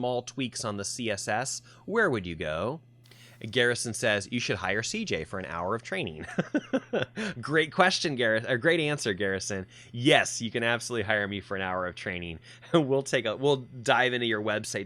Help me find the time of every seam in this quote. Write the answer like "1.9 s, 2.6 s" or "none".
none